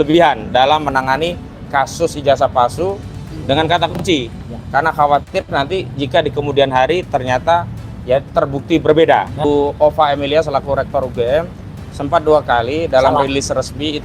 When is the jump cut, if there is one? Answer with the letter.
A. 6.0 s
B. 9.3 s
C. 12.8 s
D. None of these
B